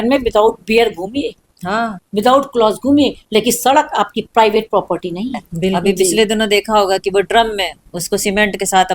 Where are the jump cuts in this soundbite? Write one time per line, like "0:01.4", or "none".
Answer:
0:05.8